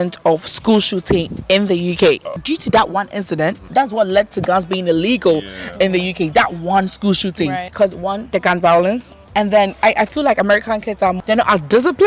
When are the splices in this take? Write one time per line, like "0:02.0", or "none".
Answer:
0:02.3
0:03.6
0:07.7